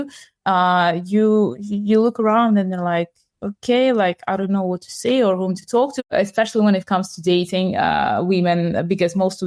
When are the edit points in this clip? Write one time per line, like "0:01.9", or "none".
0:06.1